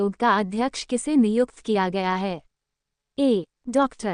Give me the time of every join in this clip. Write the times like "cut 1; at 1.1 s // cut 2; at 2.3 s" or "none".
none